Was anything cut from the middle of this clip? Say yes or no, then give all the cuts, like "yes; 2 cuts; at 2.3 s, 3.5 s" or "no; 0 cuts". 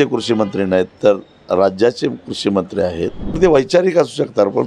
yes; 1 cut; at 3.4 s